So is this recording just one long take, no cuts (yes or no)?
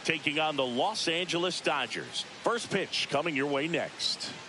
yes